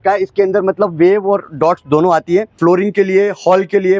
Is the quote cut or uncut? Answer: cut